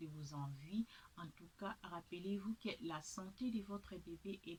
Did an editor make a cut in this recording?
no; 0 cuts

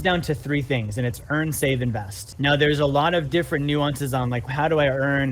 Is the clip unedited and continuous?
no; 2 cuts; at 2.3 s, 4.5 s

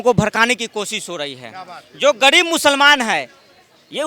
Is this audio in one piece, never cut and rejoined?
yes; 0 cuts

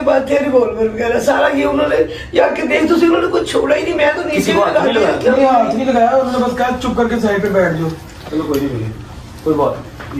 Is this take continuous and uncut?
yes; 0 cuts

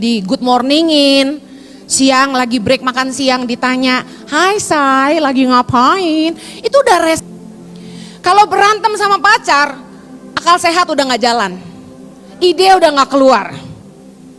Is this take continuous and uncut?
no; 1 cut; at 7.2 s

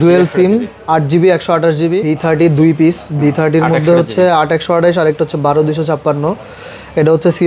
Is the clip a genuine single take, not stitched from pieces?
no; 1 cut; at 2.1 s

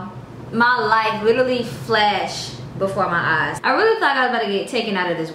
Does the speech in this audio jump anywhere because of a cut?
yes; 1 cut; at 3.6 s

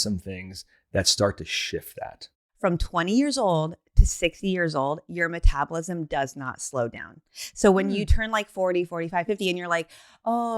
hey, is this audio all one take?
no; 1 cut; at 2.4 s

